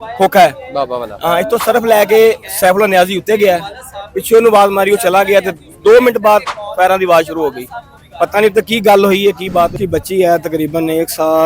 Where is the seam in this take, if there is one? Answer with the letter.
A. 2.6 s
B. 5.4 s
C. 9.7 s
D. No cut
C